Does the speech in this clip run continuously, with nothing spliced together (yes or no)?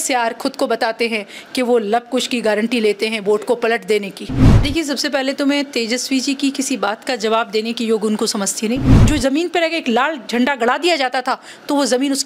no